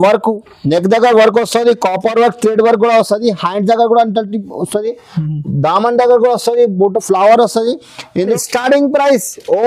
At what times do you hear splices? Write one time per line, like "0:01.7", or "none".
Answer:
0:08.3